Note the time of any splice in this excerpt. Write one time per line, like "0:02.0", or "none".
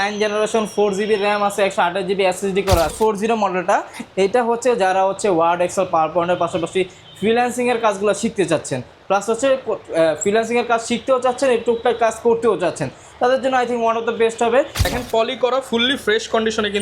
0:02.9
0:14.9